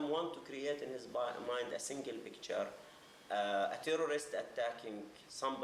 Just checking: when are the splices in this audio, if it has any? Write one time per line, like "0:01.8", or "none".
none